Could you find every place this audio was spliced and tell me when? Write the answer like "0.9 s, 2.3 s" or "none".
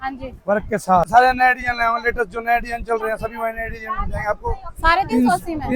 1.1 s